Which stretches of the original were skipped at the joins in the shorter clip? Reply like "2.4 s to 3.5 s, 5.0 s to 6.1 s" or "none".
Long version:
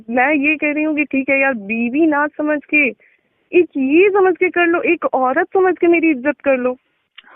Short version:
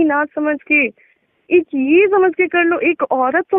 none

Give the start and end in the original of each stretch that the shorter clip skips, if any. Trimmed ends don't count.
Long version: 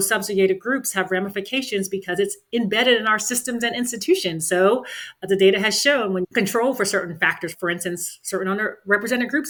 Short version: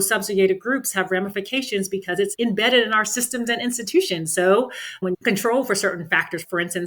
2.3 s to 2.5 s, 5.1 s to 6.1 s

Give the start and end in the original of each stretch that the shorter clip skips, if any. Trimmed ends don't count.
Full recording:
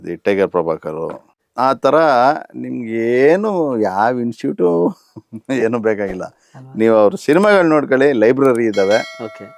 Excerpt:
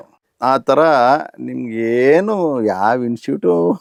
none

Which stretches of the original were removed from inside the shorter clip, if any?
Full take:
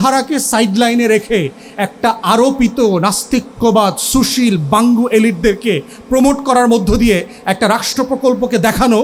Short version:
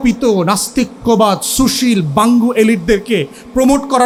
none

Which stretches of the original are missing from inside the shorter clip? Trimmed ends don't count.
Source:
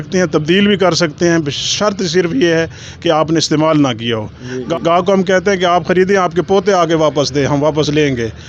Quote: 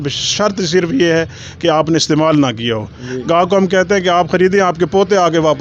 4.6 s to 4.8 s

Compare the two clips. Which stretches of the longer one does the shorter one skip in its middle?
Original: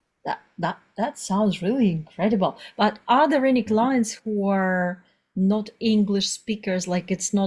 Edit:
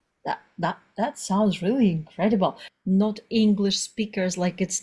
2.6 s to 5.1 s

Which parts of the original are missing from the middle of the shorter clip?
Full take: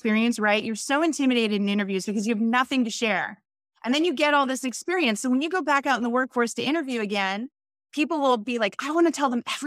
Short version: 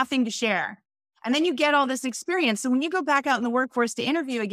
none

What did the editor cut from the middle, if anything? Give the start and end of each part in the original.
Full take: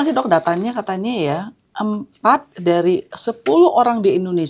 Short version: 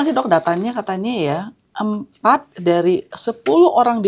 none

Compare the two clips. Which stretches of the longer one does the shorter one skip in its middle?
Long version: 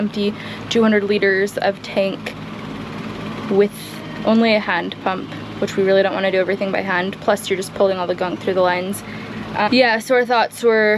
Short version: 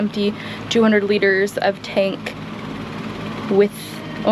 none

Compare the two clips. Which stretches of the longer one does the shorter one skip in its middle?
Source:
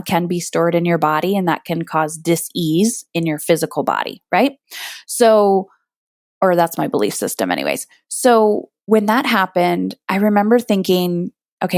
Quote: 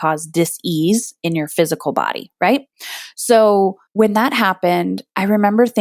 5.7 s to 8.8 s

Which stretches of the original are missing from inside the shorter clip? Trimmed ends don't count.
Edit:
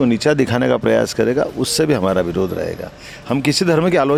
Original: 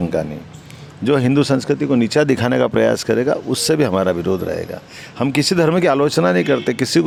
none

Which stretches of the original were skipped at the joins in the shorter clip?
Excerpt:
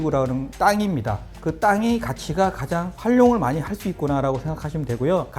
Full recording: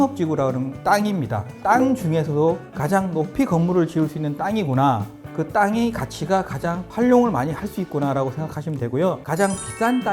1.5 s to 5.1 s

